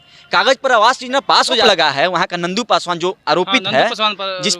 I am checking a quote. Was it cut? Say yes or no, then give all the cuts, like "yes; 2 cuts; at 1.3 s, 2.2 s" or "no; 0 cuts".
yes; 1 cut; at 1.6 s